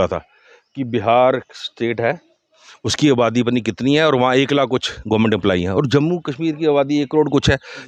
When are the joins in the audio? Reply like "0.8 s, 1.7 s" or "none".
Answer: none

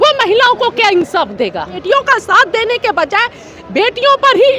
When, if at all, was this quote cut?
1.8 s

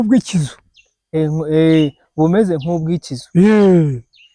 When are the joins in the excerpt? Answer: none

